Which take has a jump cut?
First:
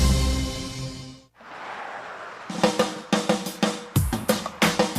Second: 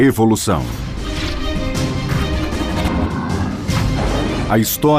first; 1 cut; at 1.3 s

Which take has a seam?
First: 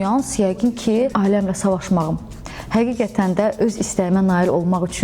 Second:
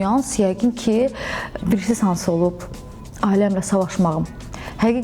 first; 1 cut; at 1.1 s

